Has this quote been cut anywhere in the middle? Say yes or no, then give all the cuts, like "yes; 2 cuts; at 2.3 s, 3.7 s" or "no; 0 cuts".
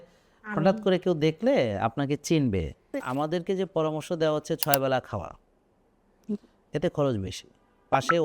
yes; 1 cut; at 3.0 s